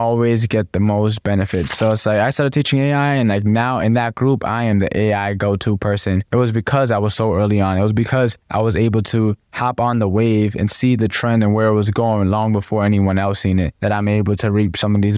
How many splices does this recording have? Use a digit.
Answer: 2